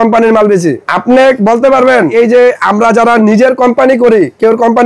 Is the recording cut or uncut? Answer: cut